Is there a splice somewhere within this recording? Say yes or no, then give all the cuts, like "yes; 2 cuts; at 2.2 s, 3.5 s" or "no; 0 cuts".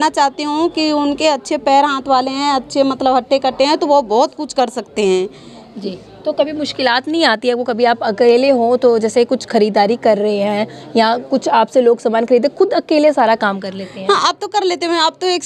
no; 0 cuts